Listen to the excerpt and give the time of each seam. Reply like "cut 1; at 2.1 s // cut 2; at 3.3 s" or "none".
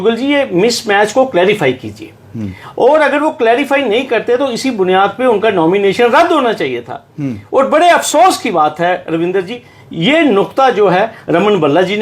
none